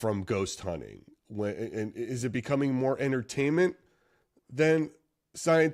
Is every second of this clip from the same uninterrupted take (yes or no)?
yes